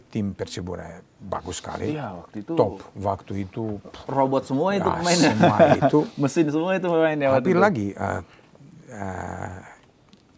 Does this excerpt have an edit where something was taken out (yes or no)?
no